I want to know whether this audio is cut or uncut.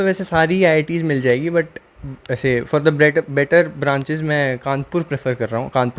uncut